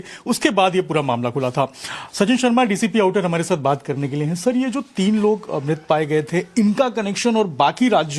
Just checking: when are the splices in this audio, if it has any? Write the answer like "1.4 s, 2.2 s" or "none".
5.8 s

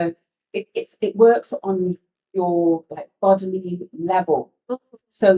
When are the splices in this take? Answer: none

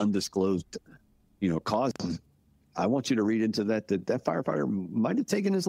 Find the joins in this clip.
none

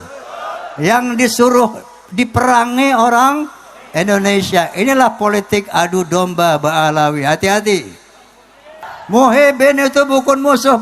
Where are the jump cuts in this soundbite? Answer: 8.7 s

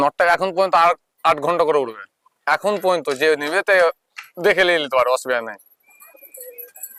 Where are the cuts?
none

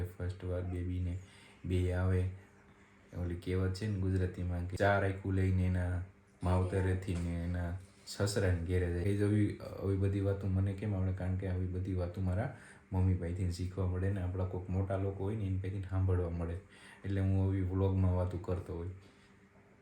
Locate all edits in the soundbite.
none

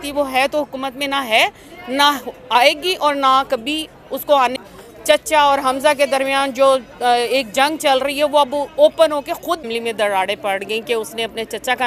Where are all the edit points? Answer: 4.4 s, 9.6 s

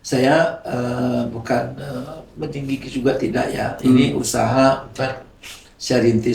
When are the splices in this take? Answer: none

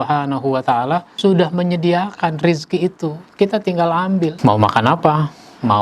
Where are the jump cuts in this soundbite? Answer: 1.1 s, 4.4 s

